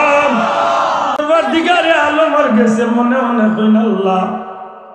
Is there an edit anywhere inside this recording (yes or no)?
yes